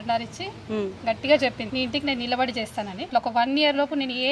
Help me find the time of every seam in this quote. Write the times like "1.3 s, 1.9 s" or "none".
1.6 s, 3.1 s